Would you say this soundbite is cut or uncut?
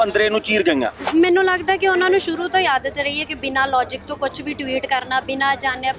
cut